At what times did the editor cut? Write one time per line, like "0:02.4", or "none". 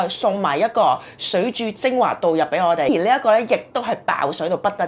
0:02.9